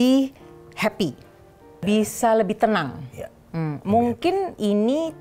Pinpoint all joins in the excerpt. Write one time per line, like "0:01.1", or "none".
0:01.8